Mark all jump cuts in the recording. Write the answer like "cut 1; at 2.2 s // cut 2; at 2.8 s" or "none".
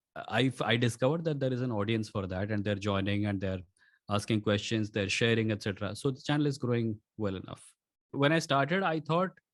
cut 1; at 8.1 s